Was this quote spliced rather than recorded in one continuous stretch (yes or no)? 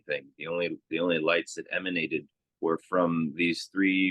yes